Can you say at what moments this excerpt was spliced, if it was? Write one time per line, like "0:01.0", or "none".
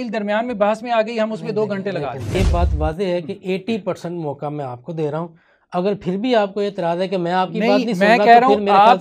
0:02.3